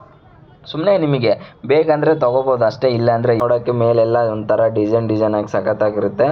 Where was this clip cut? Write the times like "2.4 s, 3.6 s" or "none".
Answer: 3.4 s